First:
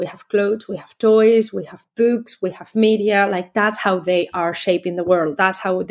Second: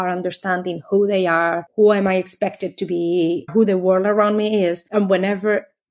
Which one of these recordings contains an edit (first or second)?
second